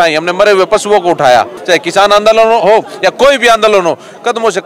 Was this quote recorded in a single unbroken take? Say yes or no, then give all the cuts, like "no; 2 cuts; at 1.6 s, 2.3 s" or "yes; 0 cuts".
no; 1 cut; at 1.6 s